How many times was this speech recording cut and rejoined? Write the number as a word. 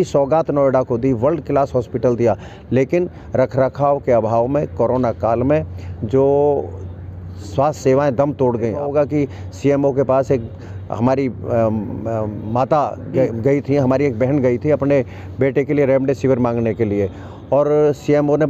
one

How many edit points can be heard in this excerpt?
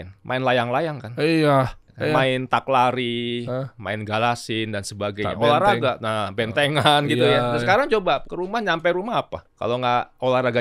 three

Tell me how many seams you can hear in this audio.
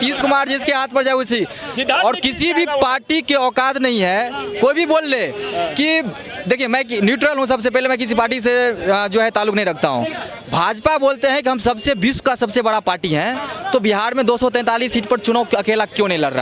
zero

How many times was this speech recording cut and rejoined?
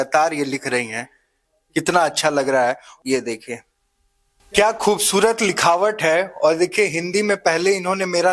zero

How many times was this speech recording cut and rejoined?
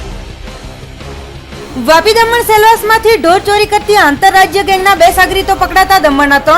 one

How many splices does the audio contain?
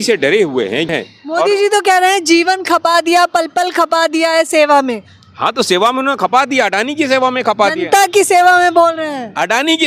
one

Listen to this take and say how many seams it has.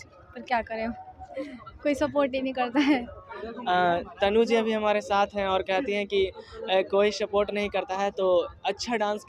zero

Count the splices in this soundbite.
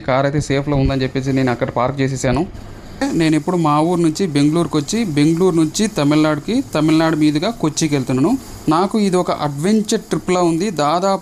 two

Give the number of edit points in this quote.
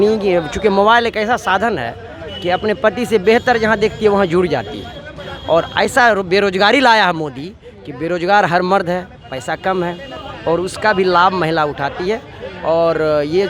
zero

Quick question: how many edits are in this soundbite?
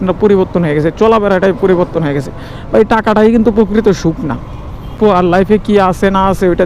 one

